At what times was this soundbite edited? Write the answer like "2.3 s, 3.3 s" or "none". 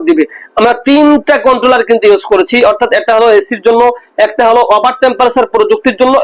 none

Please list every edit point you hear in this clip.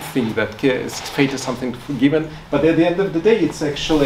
none

